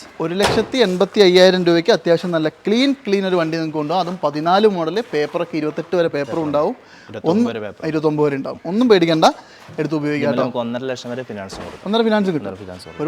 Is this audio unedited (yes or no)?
yes